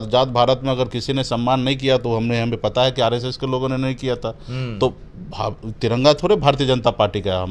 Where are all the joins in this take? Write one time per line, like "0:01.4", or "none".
none